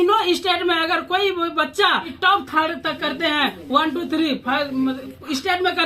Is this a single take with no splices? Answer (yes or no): no